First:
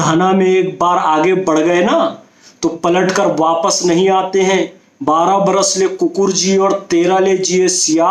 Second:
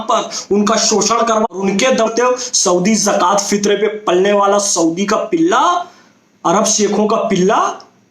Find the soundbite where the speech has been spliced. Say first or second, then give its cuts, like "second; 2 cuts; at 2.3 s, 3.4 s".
second; 1 cut; at 2.1 s